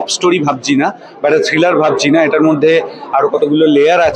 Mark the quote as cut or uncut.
uncut